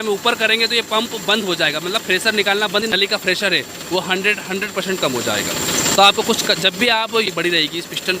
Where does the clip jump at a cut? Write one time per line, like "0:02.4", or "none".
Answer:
0:02.9
0:07.3